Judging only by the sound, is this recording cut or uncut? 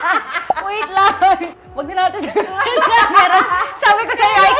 cut